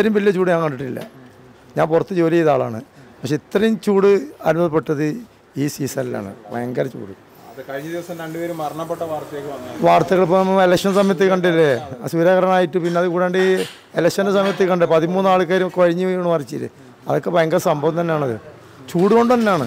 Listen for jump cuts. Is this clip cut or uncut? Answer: uncut